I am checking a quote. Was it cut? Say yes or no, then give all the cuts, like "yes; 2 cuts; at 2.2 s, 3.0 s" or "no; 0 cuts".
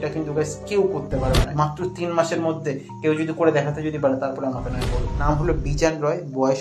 yes; 2 cuts; at 1.5 s, 5.2 s